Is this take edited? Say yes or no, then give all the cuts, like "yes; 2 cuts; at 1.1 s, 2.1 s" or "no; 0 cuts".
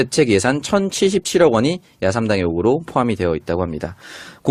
no; 0 cuts